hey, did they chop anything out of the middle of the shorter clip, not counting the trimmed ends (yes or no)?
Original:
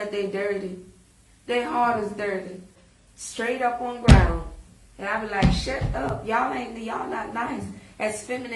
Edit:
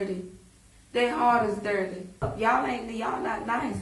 yes